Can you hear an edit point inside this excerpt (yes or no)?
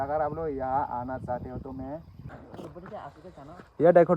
yes